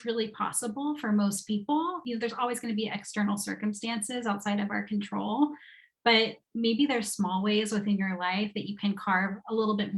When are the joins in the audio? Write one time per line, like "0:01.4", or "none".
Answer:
0:02.0